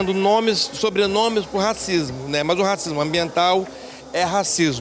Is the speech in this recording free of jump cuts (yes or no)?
yes